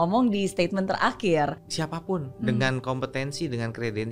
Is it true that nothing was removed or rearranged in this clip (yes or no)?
no